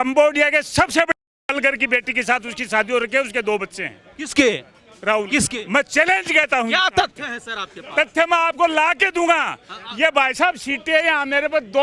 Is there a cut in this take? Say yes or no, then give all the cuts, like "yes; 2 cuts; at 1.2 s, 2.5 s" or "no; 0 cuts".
no; 0 cuts